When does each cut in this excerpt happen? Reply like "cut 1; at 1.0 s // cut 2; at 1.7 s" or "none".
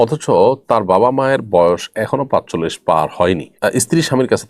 cut 1; at 3.5 s